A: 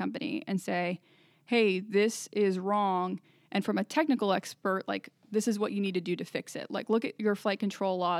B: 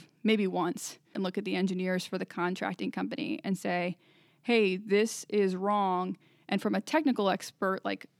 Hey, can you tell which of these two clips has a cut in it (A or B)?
B